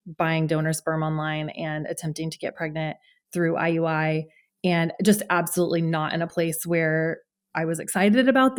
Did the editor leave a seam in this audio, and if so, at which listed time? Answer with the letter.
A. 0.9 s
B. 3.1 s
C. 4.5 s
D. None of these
D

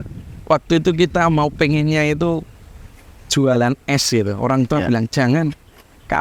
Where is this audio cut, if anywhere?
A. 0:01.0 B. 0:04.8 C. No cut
C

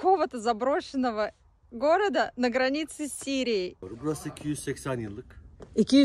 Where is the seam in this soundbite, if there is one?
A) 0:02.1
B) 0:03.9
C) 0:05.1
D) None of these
B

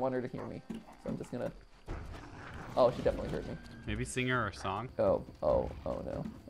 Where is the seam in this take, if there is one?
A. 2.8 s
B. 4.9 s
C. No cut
B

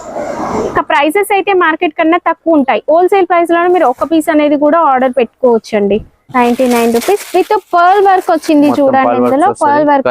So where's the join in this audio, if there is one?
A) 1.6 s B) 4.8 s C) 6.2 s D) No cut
C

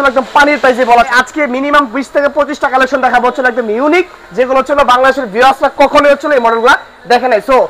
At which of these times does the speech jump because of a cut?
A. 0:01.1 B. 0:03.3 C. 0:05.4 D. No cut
A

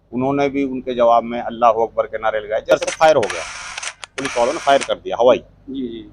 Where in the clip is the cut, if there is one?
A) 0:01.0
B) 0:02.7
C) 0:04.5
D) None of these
B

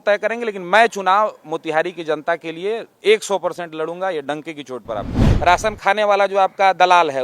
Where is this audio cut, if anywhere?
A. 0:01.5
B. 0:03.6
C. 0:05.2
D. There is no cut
C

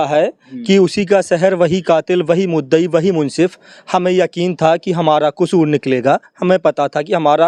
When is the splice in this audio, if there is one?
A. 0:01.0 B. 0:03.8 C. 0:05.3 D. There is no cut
D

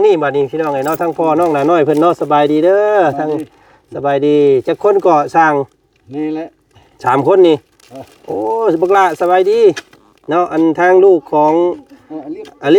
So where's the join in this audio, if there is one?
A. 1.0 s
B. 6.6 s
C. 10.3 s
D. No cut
D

